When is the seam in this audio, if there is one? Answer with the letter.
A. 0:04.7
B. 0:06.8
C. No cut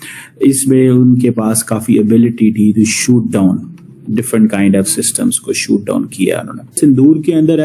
B